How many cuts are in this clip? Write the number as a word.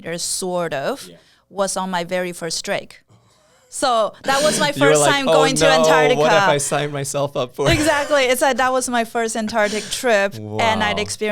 zero